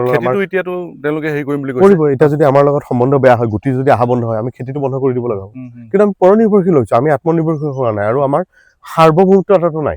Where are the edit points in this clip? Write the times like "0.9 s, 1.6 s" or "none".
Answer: none